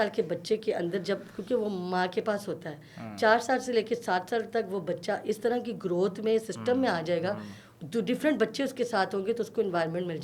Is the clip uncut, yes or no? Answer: yes